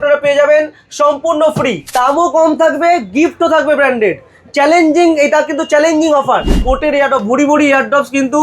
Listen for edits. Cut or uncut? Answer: cut